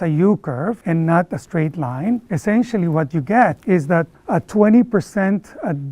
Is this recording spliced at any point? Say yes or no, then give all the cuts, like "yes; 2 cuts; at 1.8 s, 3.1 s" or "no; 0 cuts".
yes; 3 cuts; at 0.8 s, 2.3 s, 3.6 s